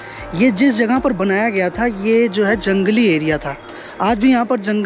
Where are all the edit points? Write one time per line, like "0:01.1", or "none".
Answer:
none